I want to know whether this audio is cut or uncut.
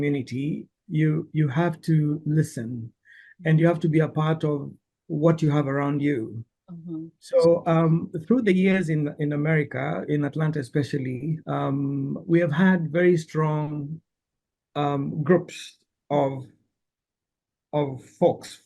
uncut